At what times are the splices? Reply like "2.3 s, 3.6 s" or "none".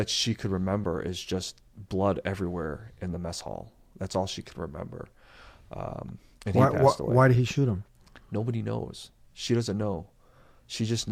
none